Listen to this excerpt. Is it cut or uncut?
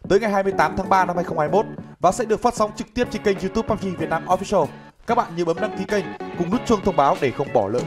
uncut